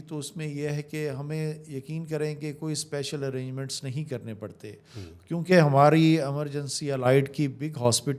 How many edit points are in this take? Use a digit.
0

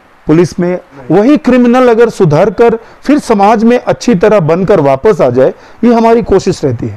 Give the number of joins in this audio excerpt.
1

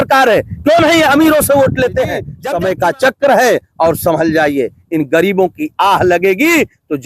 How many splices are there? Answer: 1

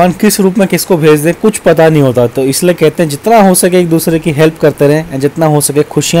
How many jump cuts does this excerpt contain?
0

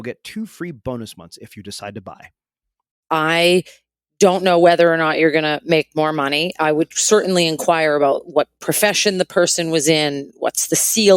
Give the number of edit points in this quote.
1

